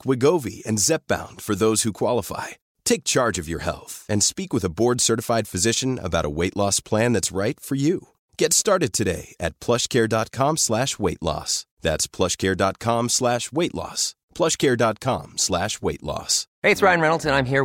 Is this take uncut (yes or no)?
no